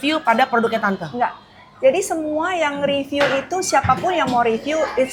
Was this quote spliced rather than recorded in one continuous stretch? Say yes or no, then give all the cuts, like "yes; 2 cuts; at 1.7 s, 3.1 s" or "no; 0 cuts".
no; 0 cuts